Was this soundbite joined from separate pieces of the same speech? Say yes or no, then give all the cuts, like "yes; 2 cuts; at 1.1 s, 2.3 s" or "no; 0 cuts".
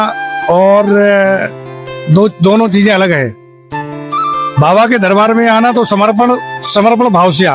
no; 0 cuts